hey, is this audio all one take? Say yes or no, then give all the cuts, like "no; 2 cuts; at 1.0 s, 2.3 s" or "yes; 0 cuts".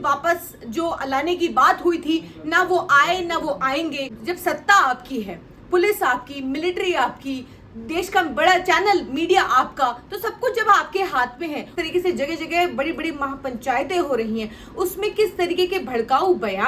no; 2 cuts; at 4.1 s, 11.7 s